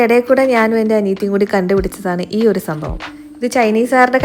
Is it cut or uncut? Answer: uncut